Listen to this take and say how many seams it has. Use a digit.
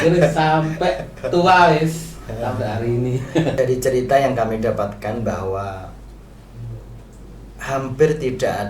1